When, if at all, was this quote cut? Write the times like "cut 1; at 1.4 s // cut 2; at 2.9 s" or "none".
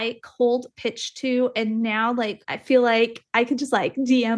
cut 1; at 2.5 s